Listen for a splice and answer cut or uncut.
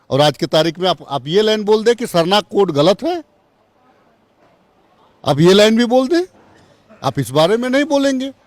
uncut